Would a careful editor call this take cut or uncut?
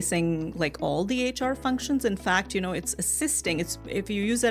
uncut